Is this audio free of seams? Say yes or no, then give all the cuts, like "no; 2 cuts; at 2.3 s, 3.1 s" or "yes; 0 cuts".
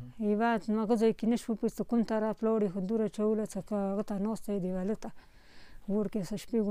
yes; 0 cuts